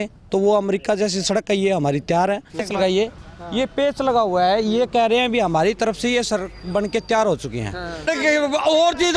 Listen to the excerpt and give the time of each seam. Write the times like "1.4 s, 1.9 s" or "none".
2.7 s, 8.1 s